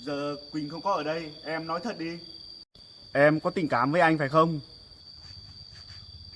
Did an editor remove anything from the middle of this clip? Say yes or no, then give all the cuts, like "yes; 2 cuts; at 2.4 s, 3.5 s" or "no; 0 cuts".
no; 0 cuts